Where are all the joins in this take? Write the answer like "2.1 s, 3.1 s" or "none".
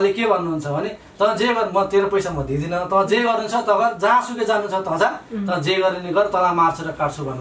none